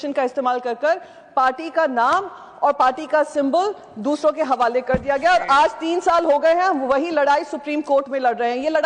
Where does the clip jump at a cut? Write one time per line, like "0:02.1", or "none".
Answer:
none